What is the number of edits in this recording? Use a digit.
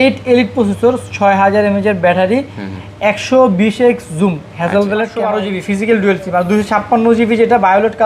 1